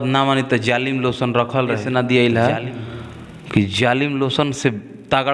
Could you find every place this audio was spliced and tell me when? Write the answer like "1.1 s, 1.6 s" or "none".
1.8 s